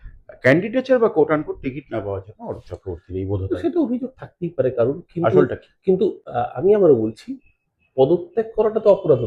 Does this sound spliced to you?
no; 0 cuts

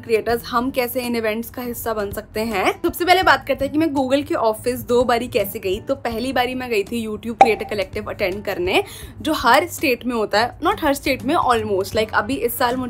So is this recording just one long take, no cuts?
yes; 0 cuts

